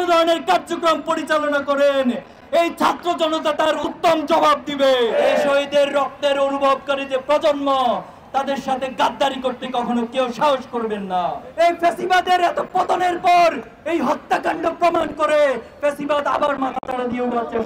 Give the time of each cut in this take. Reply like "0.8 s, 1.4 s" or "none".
5.1 s, 11.4 s